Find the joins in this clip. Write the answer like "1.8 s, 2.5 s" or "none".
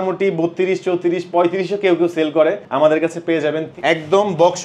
2.6 s, 3.7 s